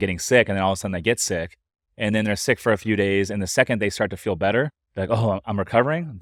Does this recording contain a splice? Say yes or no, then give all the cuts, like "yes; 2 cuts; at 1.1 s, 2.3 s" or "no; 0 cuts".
no; 0 cuts